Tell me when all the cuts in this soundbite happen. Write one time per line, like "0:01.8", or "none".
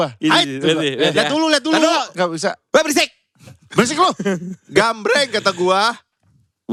none